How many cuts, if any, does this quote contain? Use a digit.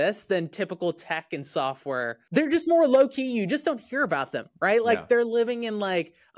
1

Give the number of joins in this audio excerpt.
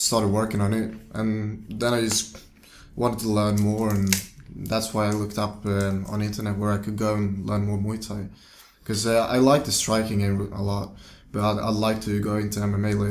1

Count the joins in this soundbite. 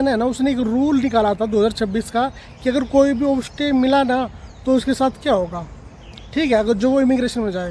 0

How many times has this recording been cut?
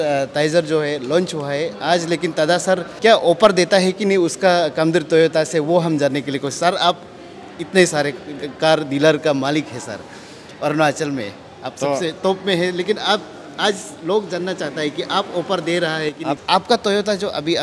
2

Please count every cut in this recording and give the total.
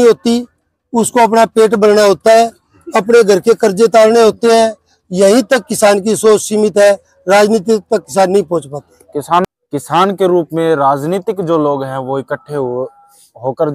1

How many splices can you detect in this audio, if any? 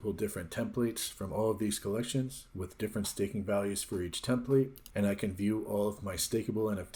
0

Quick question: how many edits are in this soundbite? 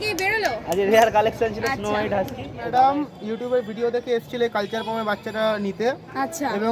1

